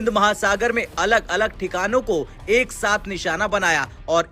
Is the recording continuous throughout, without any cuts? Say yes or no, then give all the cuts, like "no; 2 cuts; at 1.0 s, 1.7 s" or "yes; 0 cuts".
yes; 0 cuts